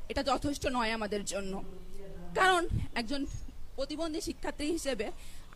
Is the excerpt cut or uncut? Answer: uncut